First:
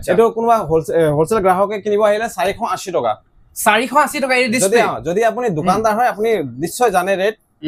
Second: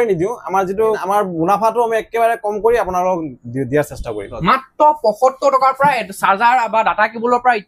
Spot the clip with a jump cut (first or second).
second